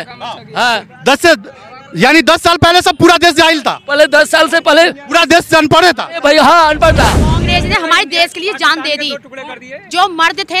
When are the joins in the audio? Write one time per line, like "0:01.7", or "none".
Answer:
0:07.2